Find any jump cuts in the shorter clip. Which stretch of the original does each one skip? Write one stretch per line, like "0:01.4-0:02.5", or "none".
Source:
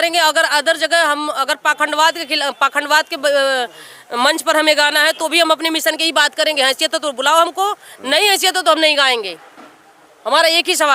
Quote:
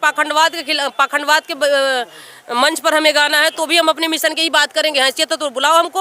none